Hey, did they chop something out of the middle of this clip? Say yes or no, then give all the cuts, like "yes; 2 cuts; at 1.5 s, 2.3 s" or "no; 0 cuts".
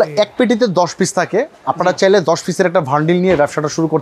no; 0 cuts